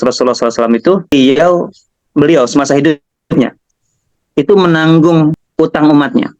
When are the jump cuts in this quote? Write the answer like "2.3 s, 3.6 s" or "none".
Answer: 1.1 s, 5.4 s